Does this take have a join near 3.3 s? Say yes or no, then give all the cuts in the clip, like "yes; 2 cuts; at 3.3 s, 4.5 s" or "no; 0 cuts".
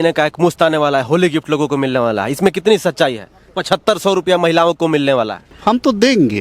no; 1 cut; at 5.5 s